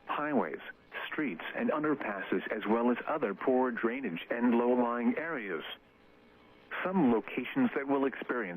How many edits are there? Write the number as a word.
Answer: zero